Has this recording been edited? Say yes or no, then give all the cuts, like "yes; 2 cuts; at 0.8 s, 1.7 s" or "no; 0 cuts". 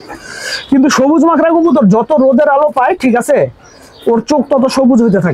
no; 0 cuts